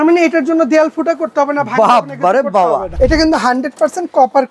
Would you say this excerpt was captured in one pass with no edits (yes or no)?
no